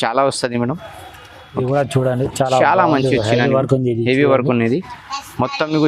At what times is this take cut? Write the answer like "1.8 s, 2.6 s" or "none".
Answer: 1.6 s